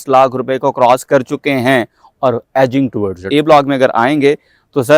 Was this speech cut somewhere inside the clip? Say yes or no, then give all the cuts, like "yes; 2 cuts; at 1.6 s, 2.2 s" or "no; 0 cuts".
yes; 1 cut; at 3.2 s